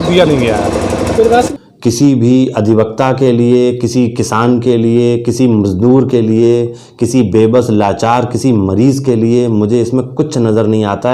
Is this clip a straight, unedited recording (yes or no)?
no